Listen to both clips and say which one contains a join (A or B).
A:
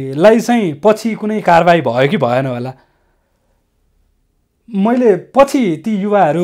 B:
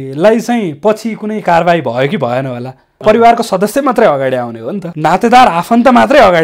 B